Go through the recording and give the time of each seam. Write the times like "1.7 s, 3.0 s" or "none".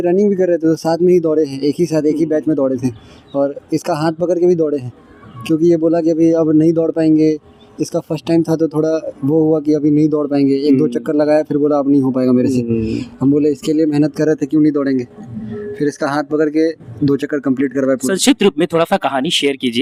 none